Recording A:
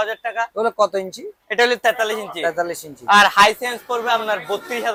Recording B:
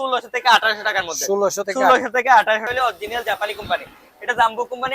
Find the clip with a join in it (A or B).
B